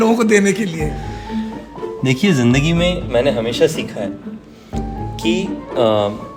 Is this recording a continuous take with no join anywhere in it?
yes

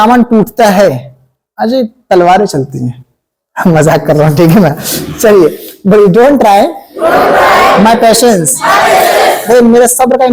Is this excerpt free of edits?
yes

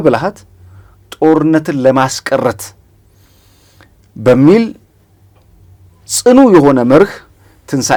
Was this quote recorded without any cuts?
yes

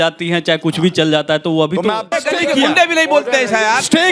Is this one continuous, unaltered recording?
no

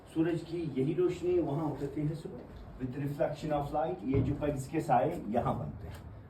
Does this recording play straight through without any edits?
yes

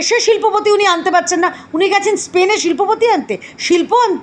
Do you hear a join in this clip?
no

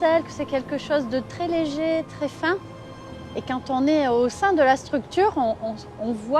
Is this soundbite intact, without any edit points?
yes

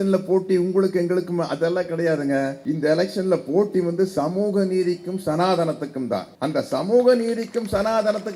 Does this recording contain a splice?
yes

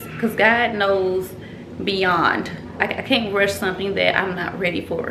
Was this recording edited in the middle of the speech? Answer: yes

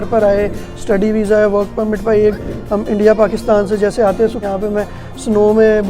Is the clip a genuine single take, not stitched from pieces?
no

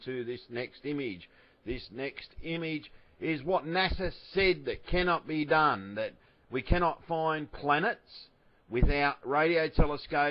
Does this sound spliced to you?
yes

